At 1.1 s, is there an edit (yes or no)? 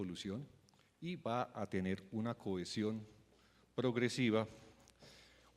yes